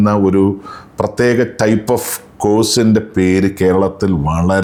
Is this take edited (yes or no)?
no